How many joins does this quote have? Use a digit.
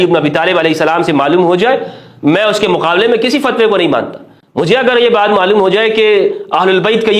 0